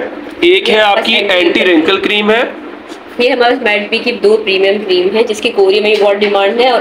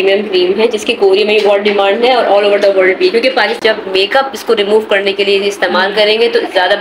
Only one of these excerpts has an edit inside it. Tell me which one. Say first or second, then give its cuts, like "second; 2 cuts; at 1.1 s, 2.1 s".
second; 1 cut; at 3.6 s